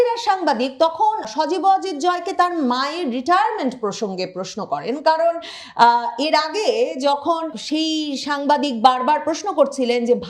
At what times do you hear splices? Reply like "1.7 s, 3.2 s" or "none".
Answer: 1.3 s, 7.6 s